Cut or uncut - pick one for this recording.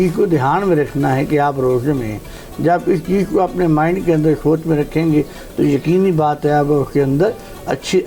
uncut